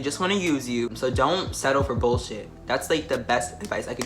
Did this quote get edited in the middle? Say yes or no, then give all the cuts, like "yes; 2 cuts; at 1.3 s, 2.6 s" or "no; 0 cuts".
yes; 1 cut; at 0.9 s